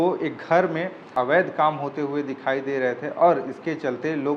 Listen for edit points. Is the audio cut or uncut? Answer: cut